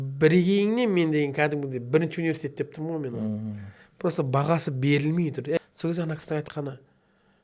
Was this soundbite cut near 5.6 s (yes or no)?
yes